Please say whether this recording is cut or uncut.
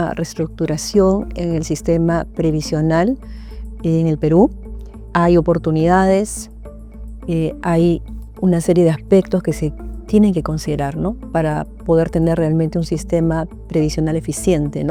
uncut